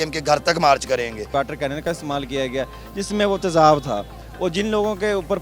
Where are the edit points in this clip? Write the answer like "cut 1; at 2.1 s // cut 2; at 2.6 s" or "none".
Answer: cut 1; at 1.3 s